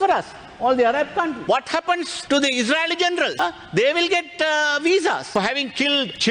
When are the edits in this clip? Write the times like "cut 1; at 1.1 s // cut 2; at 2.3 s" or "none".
cut 1; at 1.4 s